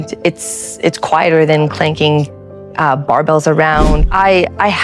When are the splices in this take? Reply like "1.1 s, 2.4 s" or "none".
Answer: 3.9 s